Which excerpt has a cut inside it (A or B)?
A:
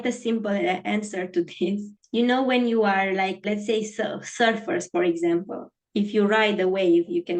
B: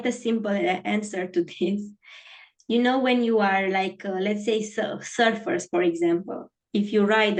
A